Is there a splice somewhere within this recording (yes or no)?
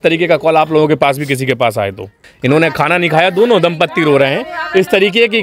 yes